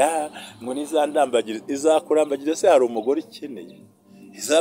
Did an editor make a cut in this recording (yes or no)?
no